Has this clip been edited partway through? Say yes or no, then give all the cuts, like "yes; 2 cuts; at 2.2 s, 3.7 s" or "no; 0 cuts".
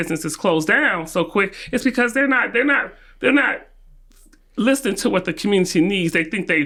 no; 0 cuts